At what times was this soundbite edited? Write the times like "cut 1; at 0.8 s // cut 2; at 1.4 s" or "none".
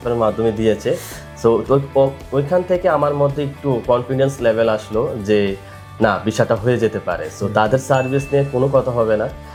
none